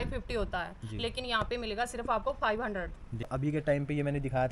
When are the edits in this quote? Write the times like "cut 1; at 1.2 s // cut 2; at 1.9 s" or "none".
cut 1; at 3.3 s

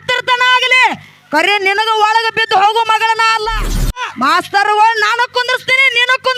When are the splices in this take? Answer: cut 1; at 4.1 s

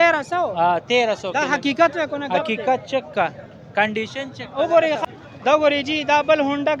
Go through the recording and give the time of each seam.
cut 1; at 5.0 s

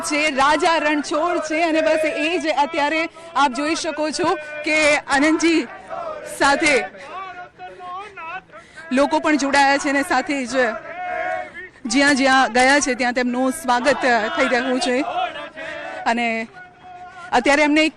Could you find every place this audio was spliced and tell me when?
cut 1; at 1.0 s

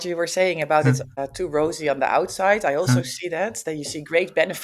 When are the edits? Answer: cut 1; at 1.2 s

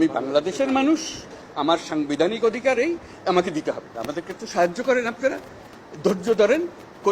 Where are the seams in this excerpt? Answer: cut 1; at 3.9 s

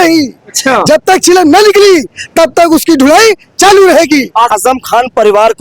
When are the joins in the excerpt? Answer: cut 1; at 4.5 s

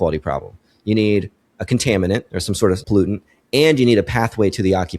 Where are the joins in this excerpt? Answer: cut 1; at 2.8 s

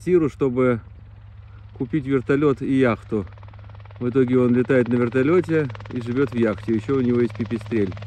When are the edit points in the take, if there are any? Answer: none

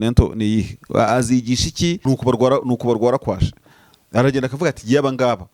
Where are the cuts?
cut 1; at 2.0 s

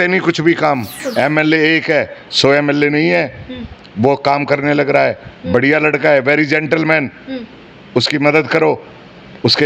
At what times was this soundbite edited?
cut 1; at 1.0 s

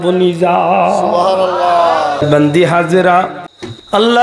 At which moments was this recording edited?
cut 1; at 2.2 s

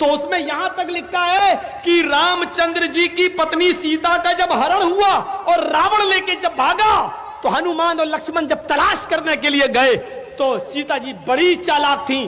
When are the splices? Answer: none

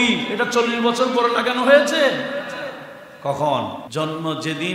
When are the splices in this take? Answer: cut 1; at 3.8 s

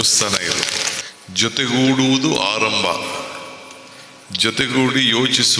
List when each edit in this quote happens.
cut 1; at 1.0 s

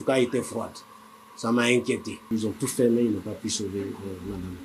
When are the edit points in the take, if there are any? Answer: cut 1; at 2.2 s

